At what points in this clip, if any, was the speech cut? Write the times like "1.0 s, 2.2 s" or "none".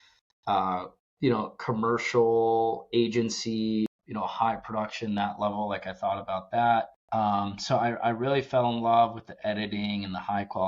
3.9 s, 7.0 s